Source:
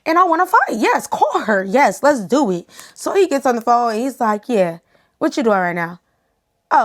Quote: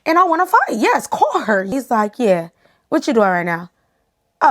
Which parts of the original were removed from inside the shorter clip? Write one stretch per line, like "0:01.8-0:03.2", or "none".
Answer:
0:01.7-0:04.0